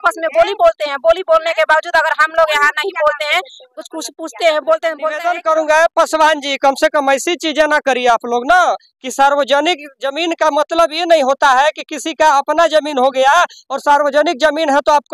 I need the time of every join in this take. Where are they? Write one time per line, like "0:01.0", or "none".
0:05.1